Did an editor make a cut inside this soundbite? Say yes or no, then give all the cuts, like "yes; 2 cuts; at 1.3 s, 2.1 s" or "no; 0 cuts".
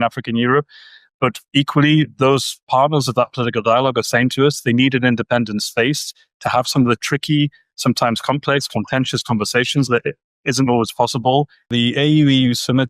yes; 1 cut; at 11.7 s